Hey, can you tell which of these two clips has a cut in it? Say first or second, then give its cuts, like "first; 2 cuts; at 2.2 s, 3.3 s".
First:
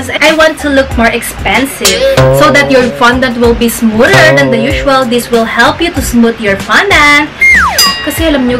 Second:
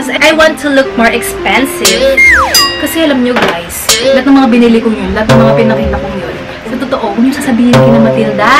first; 2 cuts; at 2.2 s, 7.5 s